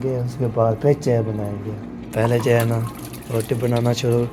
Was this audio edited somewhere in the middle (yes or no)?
no